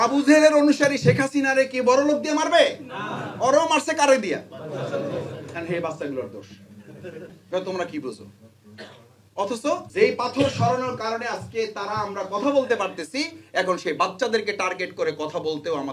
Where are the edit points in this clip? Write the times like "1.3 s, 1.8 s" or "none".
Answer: 7.4 s, 9.9 s